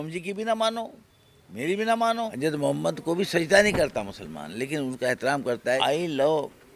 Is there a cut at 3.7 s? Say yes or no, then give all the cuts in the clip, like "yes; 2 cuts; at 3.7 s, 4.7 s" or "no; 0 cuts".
no; 2 cuts; at 2.3 s, 5.8 s